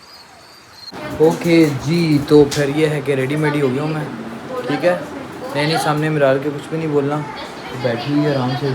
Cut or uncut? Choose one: cut